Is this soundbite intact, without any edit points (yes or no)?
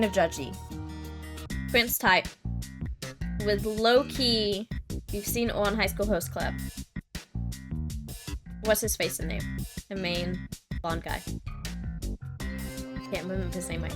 no